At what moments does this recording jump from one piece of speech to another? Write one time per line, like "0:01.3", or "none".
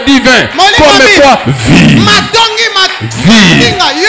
none